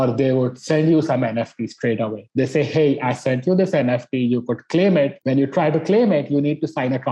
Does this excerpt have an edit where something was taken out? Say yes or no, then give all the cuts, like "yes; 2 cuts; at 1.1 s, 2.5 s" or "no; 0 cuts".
no; 0 cuts